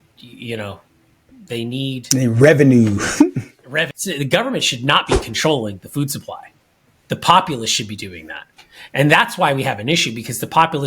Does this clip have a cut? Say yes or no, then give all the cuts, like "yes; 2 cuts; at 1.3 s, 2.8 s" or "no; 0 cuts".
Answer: yes; 1 cut; at 3.9 s